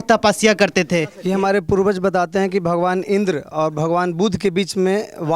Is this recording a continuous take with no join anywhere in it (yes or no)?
no